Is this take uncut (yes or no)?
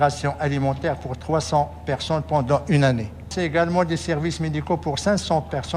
no